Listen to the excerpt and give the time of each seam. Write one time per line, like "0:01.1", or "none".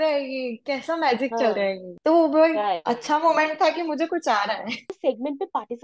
0:01.9
0:05.0